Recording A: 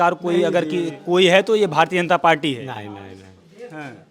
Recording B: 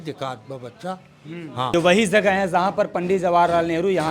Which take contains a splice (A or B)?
B